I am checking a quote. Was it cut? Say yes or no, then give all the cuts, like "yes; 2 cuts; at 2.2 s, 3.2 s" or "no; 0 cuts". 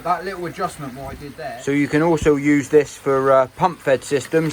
yes; 1 cut; at 1.2 s